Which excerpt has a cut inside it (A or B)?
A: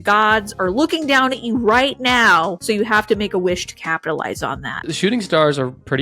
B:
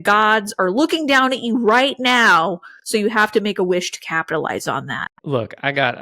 A